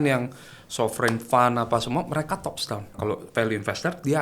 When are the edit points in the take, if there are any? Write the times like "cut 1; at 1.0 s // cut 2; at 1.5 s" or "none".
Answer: cut 1; at 2.9 s